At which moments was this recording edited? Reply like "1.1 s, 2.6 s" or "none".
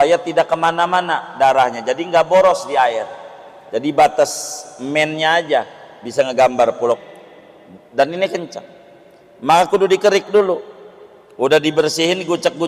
7.0 s